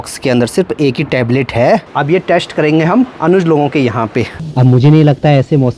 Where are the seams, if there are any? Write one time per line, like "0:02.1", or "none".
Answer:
0:01.9
0:04.4